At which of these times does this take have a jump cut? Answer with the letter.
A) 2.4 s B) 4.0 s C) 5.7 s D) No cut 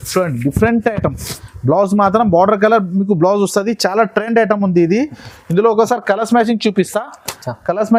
D